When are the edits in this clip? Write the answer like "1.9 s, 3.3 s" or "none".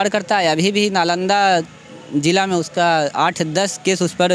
none